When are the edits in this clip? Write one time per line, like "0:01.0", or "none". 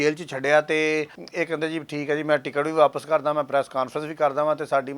0:01.2